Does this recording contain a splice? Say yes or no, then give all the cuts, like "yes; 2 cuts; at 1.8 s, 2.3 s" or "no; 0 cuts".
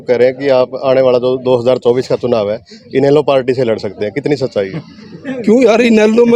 no; 0 cuts